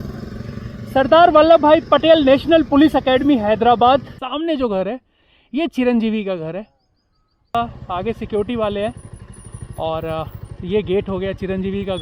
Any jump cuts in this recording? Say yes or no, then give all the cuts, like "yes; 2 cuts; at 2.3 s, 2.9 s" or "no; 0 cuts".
yes; 2 cuts; at 4.2 s, 7.5 s